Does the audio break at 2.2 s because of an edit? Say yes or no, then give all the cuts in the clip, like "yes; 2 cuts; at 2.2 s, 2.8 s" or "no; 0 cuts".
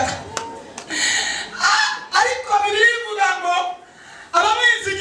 no; 0 cuts